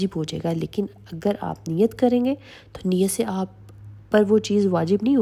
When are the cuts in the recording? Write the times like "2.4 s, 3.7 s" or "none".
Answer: none